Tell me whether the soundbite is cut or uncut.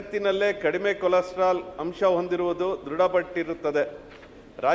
uncut